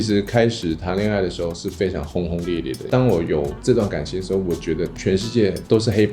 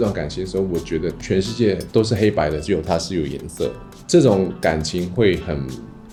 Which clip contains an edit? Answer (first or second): first